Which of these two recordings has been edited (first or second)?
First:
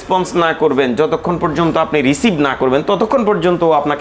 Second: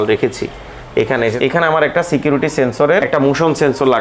second